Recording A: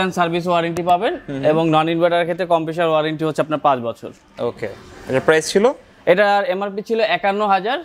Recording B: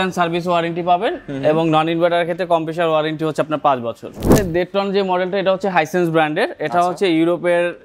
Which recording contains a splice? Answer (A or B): B